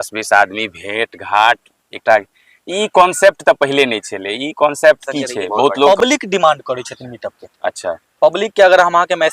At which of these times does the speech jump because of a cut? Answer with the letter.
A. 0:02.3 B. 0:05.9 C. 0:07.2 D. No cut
B